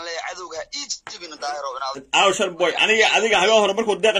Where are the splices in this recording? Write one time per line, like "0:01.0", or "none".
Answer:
0:02.0